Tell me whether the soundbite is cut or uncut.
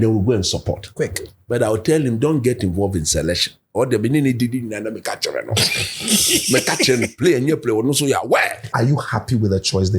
cut